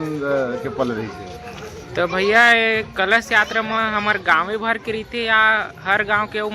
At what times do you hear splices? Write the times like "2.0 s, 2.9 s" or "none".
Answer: none